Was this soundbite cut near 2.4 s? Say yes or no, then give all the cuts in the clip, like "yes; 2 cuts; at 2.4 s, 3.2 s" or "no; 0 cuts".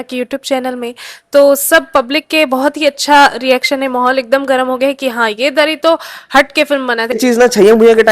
no; 1 cut; at 7.2 s